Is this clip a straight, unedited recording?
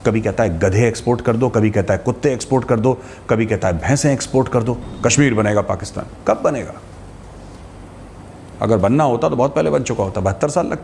no; 1 cut; at 4.9 s

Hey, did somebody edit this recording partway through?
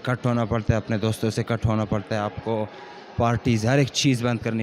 no; 0 cuts

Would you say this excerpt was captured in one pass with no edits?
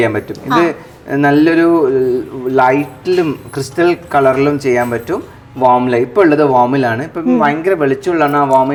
yes; 0 cuts

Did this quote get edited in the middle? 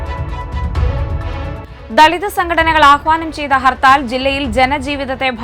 yes; 1 cut; at 1.2 s

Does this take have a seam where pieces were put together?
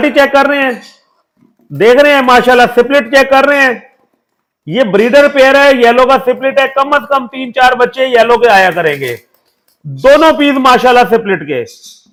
no; 0 cuts

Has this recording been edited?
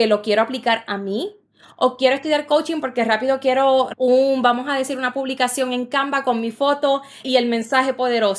yes; 2 cuts; at 3.9 s, 7.2 s

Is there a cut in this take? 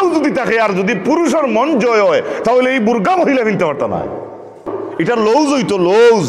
yes; 1 cut; at 4.8 s

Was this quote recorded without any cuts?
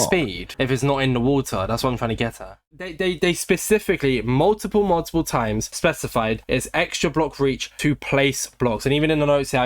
no; 1 cut; at 2.6 s

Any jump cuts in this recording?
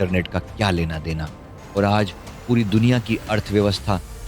yes; 1 cut; at 1.5 s

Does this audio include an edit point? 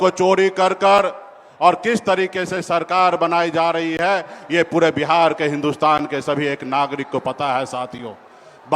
no; 0 cuts

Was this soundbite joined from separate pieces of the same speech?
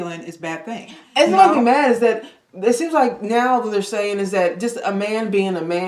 no; 0 cuts

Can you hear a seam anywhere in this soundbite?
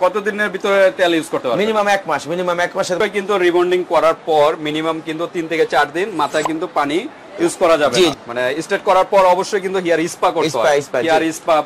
yes; 2 cuts; at 3.0 s, 8.1 s

